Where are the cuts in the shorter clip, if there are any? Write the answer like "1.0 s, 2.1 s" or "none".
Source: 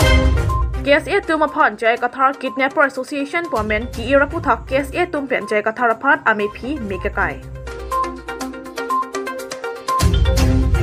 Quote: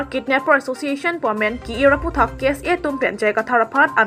none